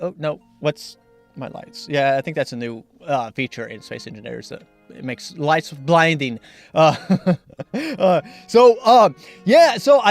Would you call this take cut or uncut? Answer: cut